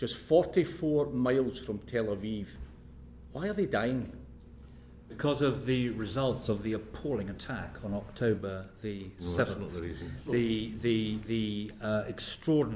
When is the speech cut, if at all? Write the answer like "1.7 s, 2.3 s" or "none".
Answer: none